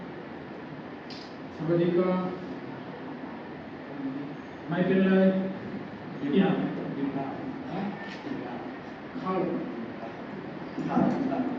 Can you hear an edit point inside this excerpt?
no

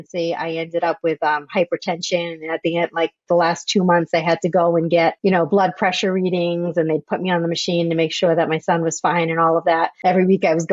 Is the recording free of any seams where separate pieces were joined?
yes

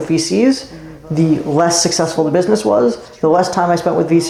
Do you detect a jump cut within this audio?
no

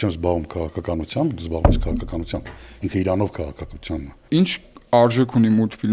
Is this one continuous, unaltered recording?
no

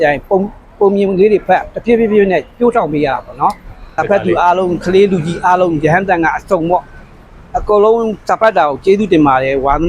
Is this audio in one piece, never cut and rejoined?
no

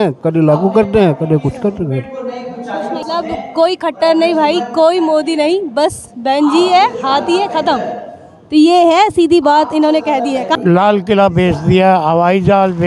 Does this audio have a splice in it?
yes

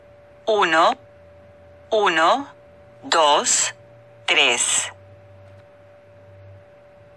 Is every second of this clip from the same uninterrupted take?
yes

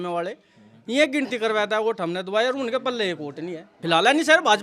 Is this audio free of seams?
no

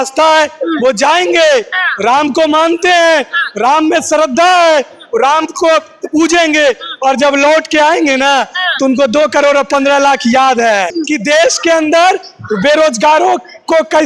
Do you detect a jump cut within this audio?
yes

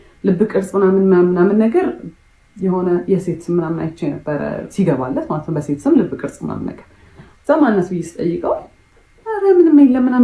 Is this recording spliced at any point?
no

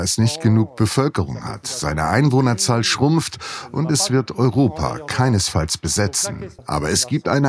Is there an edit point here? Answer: yes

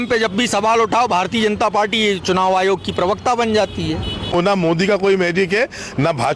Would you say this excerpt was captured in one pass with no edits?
no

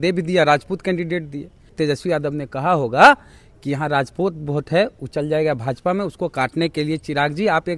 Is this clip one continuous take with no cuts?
no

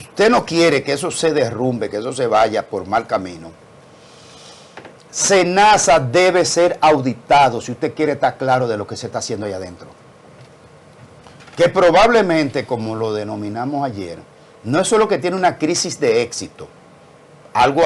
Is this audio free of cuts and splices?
yes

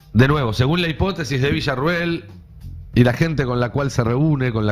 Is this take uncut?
yes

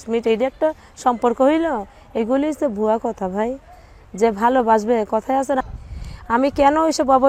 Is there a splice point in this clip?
yes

